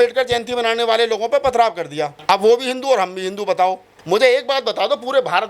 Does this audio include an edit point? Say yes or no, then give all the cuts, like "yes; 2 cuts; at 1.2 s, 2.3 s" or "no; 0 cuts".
yes; 2 cuts; at 2.1 s, 3.9 s